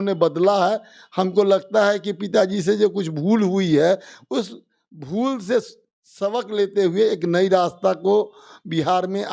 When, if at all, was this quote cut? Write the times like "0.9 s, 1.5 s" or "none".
none